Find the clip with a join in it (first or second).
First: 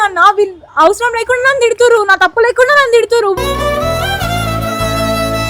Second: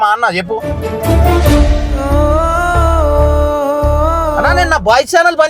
second